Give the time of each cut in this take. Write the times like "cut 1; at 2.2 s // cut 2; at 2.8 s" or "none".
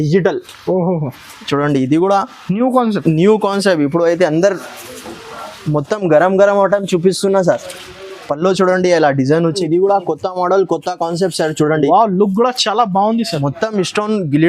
cut 1; at 9.6 s